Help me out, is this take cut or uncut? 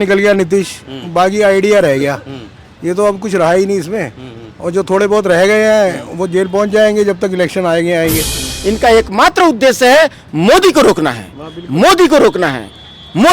cut